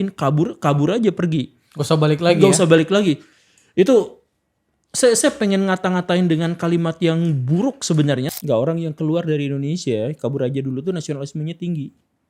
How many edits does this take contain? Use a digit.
1